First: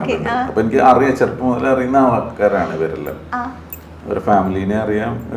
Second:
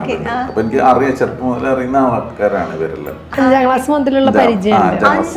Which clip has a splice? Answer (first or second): second